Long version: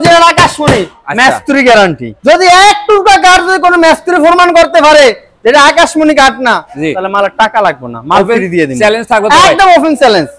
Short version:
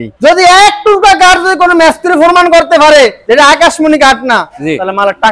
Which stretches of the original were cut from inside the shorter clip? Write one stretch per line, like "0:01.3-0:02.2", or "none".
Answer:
0:05.2-0:05.3